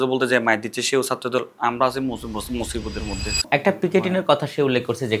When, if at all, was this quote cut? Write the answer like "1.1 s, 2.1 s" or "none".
3.5 s